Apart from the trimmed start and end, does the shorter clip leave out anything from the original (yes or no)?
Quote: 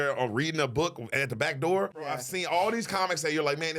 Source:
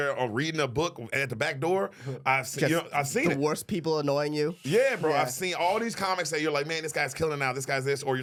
yes